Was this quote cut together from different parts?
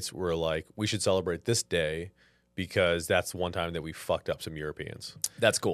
no; 0 cuts

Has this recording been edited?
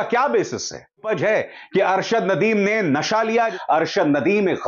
yes; 2 cuts; at 1.0 s, 3.6 s

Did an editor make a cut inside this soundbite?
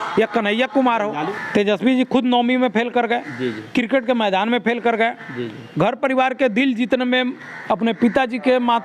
yes; 1 cut; at 1.2 s

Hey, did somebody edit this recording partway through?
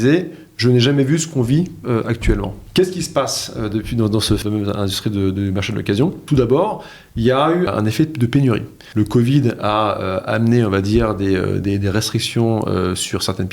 yes; 5 cuts; at 2.6 s, 4.4 s, 6.2 s, 7.7 s, 8.8 s

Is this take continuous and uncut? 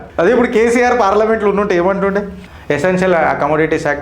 no; 1 cut; at 2.5 s

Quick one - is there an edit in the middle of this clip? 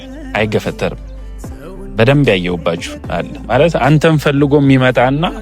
yes; 1 cut; at 3.4 s

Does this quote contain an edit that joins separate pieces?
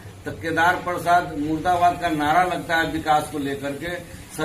no; 0 cuts

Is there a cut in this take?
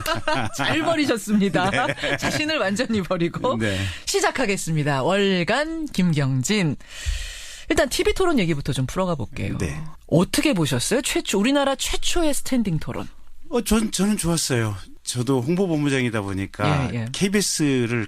yes; 1 cut; at 7.2 s

